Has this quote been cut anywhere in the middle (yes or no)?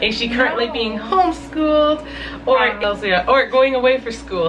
yes